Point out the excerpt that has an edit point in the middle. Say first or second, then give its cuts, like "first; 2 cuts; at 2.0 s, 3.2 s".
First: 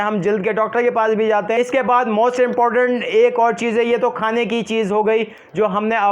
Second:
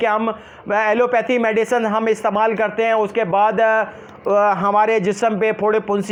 first; 1 cut; at 1.6 s